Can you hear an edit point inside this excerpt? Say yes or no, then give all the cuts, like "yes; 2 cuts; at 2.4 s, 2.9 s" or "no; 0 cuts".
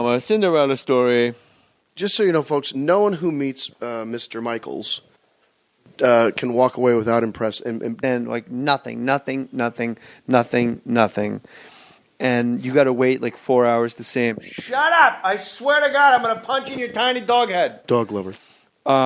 no; 0 cuts